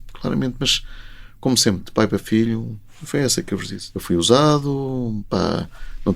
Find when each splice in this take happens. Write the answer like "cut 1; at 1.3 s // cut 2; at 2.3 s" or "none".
cut 1; at 3.8 s